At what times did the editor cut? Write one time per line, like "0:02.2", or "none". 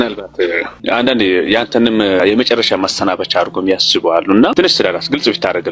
0:00.8
0:02.2